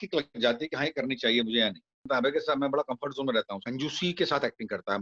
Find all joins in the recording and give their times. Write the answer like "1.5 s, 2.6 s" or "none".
2.0 s, 3.7 s

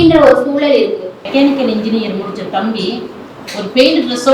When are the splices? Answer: 1.2 s

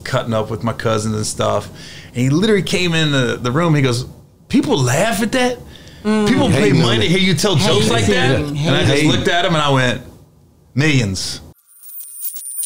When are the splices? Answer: 11.5 s

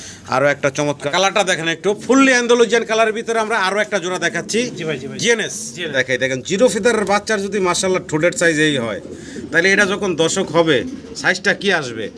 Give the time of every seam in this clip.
1.0 s, 5.9 s

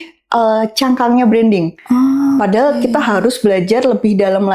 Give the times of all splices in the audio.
none

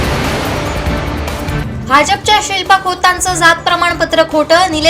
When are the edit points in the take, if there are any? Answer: 1.6 s

